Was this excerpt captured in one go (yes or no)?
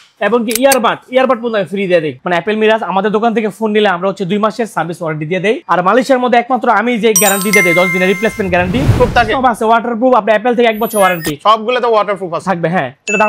no